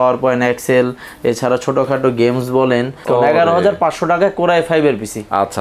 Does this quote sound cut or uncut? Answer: cut